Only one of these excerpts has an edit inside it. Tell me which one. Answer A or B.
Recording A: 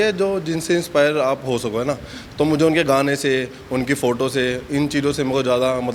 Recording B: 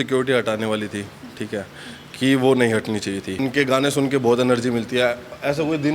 B